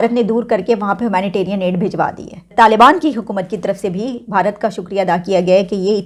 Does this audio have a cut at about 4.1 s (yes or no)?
no